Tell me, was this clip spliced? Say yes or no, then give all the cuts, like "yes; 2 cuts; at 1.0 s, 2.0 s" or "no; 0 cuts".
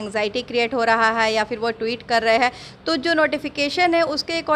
no; 0 cuts